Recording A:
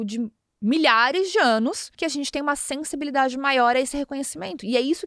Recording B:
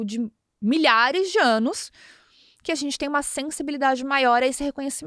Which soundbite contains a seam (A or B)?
A